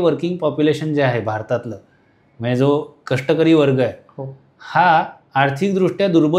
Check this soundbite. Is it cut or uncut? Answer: uncut